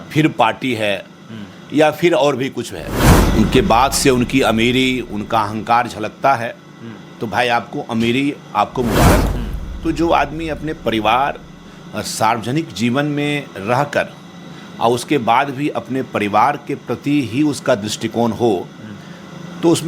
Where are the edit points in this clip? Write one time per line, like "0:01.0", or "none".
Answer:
0:03.1
0:09.4